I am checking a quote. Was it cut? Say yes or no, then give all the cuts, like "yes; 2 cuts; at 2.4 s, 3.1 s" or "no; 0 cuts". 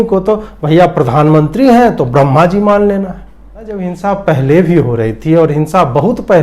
yes; 1 cut; at 3.6 s